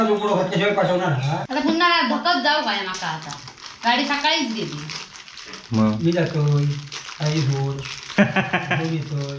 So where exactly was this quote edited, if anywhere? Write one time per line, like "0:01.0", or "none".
none